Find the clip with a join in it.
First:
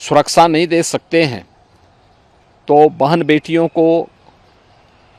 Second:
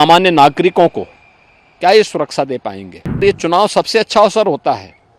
second; 1 cut; at 3.2 s

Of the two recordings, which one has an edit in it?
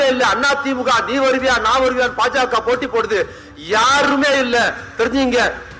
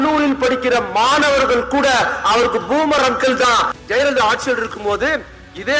second; 1 cut; at 3.7 s

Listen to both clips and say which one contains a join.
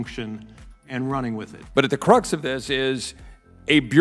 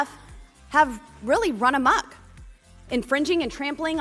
first; 1 cut; at 1.5 s

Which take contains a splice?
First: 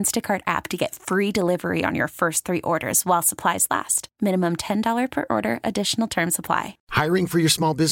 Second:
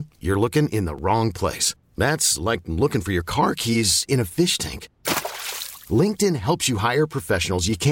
first; 1 cut; at 6.8 s

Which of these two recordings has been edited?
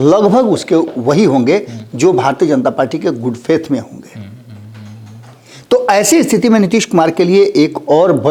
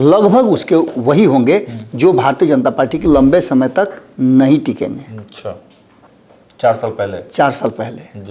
second; 1 cut; at 3.0 s

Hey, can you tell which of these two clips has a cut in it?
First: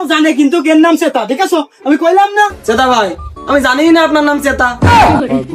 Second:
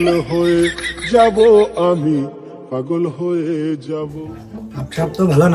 first; 1 cut; at 2.6 s

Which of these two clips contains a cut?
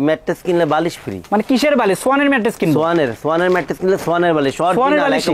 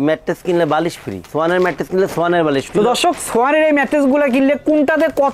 second; 2 cuts; at 1.2 s, 2.6 s

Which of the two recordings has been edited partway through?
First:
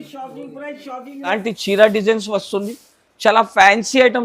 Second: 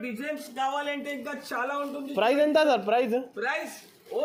first; 1 cut; at 1.3 s

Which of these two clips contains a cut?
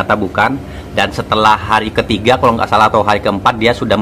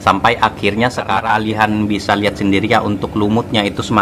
second; 1 cut; at 1.3 s

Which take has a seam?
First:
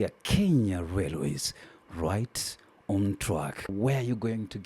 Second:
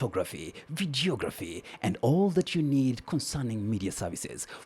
first; 1 cut; at 3.7 s

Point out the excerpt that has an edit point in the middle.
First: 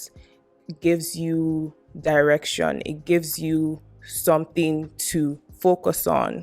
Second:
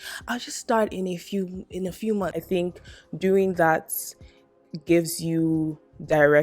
second; 1 cut; at 2.4 s

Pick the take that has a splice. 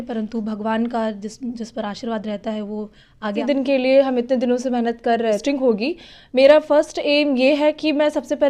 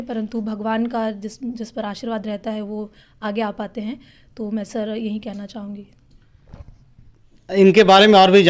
first; 2 cuts; at 3.4 s, 5.4 s

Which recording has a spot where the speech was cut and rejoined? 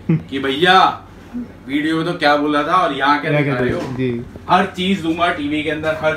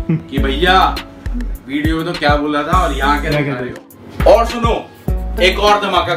second; 1 cut; at 3.8 s

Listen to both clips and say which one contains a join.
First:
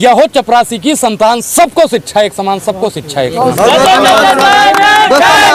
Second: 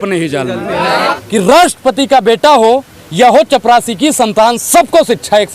second; 1 cut; at 1.0 s

